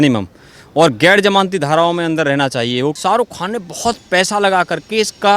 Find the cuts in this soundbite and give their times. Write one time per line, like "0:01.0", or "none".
0:03.0